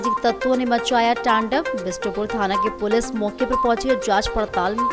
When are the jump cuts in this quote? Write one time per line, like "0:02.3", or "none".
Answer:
none